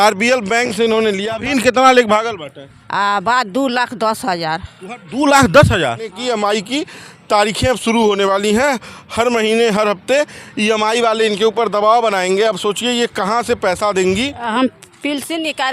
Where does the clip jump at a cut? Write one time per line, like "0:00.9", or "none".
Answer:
0:01.3
0:06.2
0:14.4